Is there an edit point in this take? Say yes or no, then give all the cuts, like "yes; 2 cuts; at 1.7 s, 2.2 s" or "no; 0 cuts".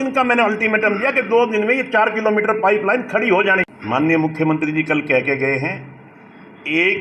yes; 1 cut; at 3.7 s